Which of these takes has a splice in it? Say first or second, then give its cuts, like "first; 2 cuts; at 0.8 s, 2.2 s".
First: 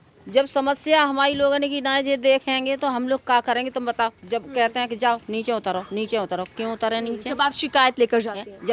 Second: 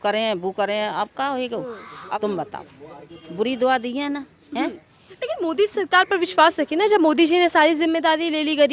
second; 1 cut; at 2.1 s